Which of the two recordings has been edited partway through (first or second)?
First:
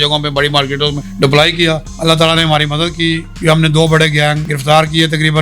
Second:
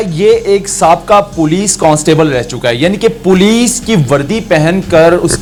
first